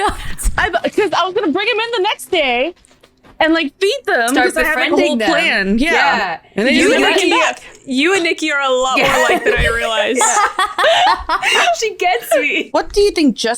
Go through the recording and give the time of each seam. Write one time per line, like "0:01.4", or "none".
0:12.6